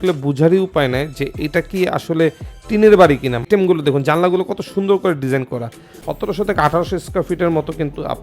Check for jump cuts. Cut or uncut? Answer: cut